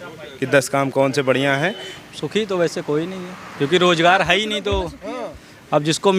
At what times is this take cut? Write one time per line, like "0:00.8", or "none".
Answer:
0:01.9